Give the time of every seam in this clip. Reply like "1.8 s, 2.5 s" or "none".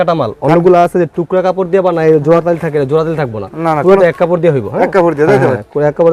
none